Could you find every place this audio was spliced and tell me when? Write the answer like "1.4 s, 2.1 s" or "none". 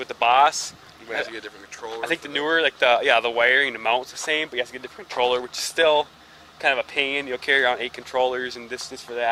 none